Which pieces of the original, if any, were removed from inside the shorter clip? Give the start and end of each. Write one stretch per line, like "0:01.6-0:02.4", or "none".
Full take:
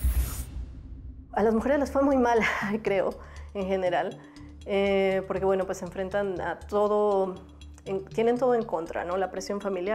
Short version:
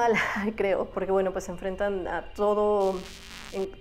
0:03.2-0:05.3